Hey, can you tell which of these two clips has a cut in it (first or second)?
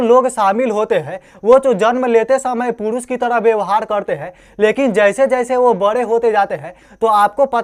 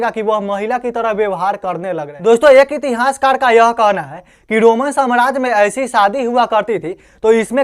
second